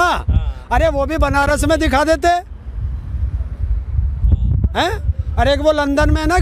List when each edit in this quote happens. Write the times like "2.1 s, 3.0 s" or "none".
none